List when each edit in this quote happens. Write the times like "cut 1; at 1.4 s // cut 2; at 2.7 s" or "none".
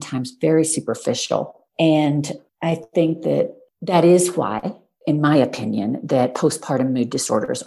cut 1; at 1.6 s